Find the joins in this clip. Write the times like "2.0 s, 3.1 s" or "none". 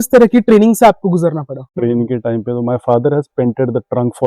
1.6 s